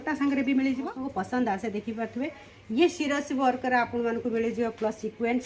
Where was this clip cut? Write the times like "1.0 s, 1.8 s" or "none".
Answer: 1.0 s